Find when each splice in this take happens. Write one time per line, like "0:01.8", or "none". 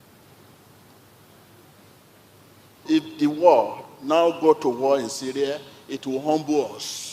0:03.9